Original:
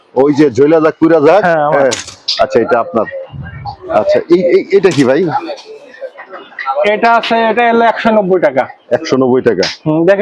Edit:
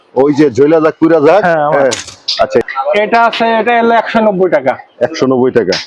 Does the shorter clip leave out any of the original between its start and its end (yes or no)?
yes